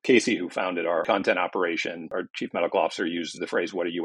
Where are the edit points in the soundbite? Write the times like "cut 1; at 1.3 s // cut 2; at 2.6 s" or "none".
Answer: cut 1; at 1.0 s